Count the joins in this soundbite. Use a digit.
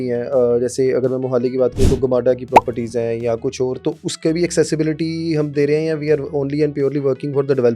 0